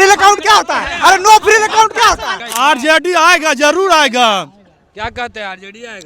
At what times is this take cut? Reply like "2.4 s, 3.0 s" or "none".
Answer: 2.4 s

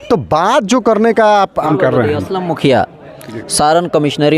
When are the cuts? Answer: 1.6 s

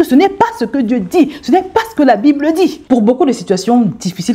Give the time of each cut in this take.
2.8 s

